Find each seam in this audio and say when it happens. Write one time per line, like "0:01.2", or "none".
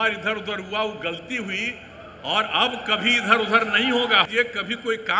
0:04.3